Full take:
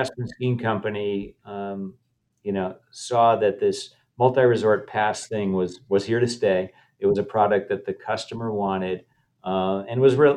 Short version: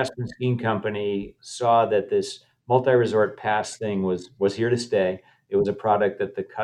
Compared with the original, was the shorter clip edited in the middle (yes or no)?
yes